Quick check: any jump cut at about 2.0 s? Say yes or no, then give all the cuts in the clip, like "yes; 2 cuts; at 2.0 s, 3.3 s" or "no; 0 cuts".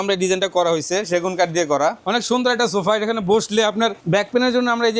yes; 2 cuts; at 2.0 s, 4.0 s